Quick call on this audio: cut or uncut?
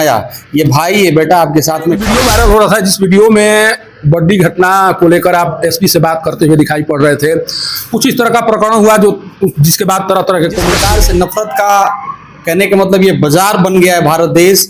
cut